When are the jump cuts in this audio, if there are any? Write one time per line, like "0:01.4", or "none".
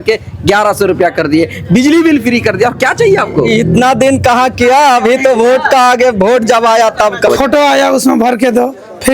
0:07.3